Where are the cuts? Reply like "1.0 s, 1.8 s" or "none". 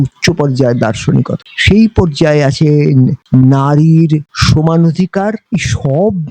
1.4 s, 5.4 s